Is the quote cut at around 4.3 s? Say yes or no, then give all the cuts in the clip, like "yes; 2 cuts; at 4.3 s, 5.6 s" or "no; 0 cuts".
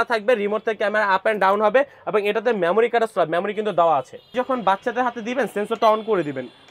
yes; 1 cut; at 4.3 s